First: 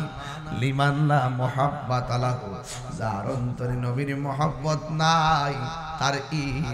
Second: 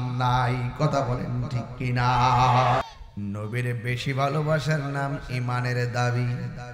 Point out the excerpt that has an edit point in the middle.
second; 1 cut; at 2.8 s

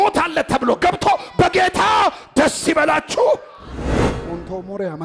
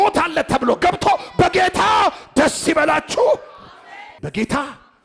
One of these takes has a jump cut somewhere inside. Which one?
first; 1 cut; at 4.0 s

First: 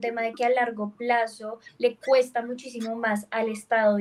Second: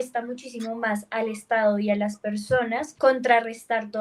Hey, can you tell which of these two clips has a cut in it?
second; 1 cut; at 2.9 s

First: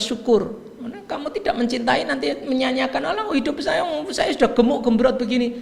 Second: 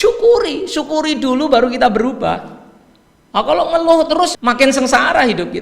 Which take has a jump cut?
second; 1 cut; at 4.4 s

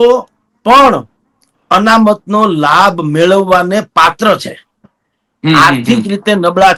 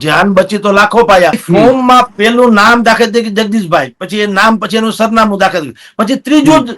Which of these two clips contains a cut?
second; 1 cut; at 1.4 s

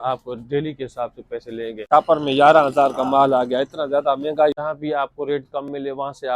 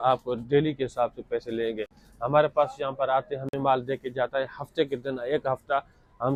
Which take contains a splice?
first; 2 cuts; at 1.8 s, 4.5 s

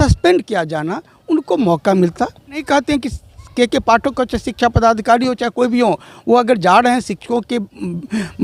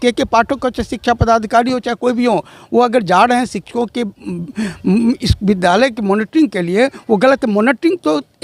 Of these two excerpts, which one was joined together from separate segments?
first; 1 cut; at 2.6 s

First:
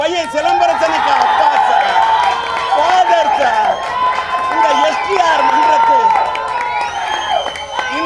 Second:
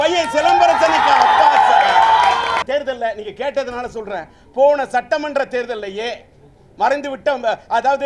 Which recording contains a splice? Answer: second; 1 cut; at 2.6 s

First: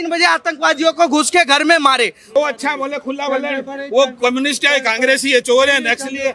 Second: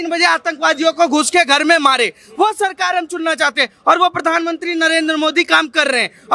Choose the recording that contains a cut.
first; 1 cut; at 2.3 s

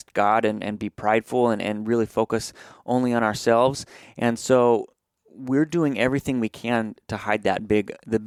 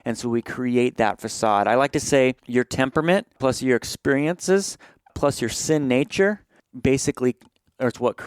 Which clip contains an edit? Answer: second; 4 cuts; at 2.4 s, 3.4 s, 5.1 s, 6.6 s

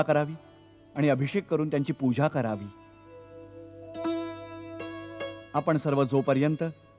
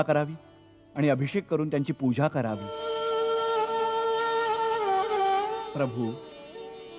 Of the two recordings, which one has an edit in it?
second; 1 cut; at 2.7 s

